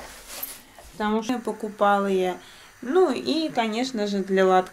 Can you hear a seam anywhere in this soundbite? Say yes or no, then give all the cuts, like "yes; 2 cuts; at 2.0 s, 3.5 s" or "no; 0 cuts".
yes; 1 cut; at 1.3 s